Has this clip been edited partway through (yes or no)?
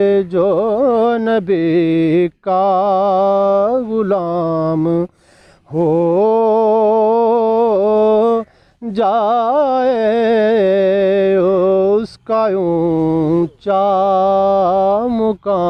no